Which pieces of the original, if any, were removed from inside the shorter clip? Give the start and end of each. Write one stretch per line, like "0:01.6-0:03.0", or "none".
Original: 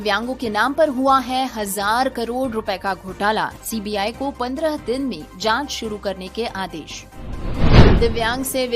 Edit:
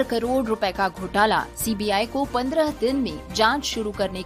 none